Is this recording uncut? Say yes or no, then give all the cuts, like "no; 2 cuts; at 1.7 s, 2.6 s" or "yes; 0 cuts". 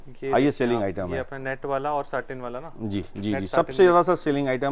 yes; 0 cuts